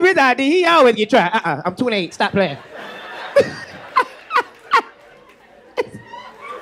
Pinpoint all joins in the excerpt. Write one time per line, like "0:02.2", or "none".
none